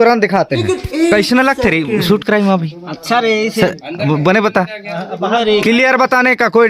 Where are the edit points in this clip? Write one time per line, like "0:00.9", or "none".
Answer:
0:00.9